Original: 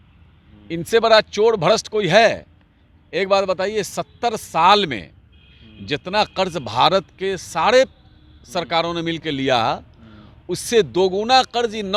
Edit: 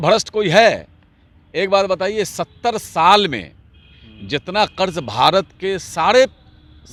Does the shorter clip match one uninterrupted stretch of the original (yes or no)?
yes